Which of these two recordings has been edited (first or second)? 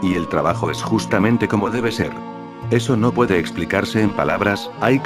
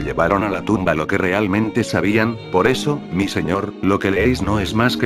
second